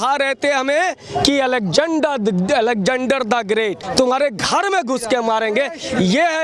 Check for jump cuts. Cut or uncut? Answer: cut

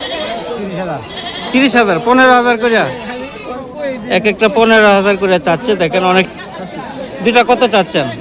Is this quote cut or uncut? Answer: cut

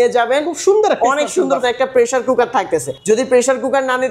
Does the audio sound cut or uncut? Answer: cut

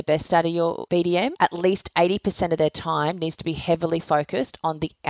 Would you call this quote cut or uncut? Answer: cut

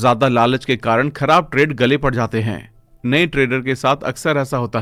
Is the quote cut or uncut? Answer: uncut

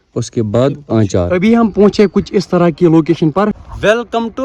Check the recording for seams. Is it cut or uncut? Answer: cut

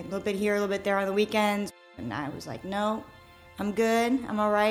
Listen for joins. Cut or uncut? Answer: cut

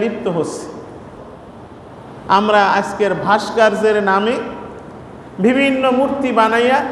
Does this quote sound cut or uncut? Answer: cut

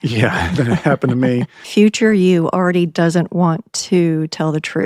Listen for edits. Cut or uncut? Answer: cut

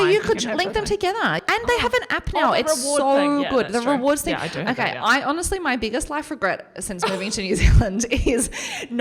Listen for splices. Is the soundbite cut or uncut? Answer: cut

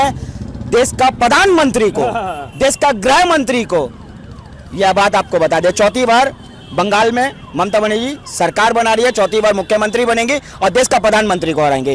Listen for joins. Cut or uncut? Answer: uncut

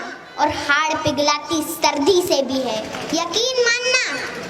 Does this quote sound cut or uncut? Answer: cut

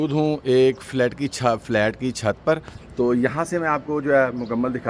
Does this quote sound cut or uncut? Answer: uncut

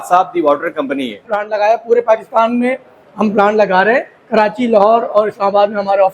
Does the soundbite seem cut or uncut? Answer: cut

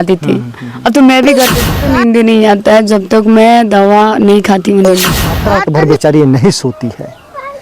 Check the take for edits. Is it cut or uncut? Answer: cut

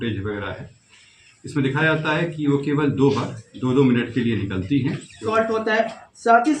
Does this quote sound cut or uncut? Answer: cut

